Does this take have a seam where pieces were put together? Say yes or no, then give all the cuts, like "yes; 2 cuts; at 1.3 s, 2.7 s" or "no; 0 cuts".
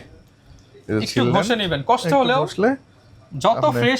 no; 0 cuts